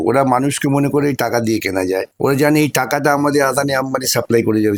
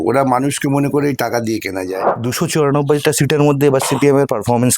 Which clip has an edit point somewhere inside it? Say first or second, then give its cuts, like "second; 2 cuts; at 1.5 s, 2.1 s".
second; 1 cut; at 2.1 s